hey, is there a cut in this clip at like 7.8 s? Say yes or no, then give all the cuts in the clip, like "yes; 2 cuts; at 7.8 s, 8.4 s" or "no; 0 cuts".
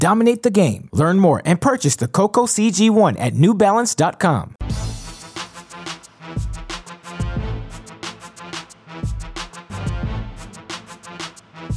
yes; 2 cuts; at 4.6 s, 7.8 s